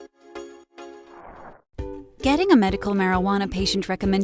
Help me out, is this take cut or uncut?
cut